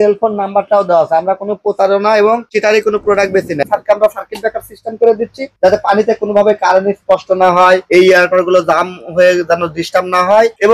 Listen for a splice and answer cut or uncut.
cut